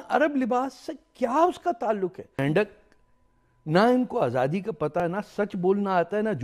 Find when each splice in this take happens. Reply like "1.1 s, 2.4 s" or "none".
2.4 s, 5.0 s